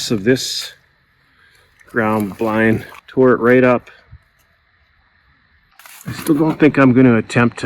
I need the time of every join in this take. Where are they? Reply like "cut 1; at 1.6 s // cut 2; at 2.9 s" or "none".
cut 1; at 3.0 s // cut 2; at 5.8 s